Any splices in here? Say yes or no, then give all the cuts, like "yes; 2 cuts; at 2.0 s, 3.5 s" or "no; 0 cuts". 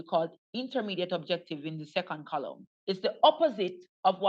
yes; 1 cut; at 2.7 s